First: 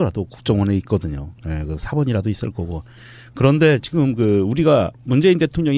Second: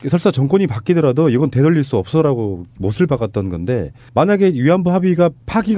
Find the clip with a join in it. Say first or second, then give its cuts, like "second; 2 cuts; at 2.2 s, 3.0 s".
second; 1 cut; at 3.9 s